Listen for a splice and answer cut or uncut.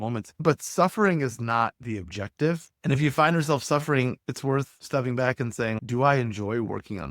cut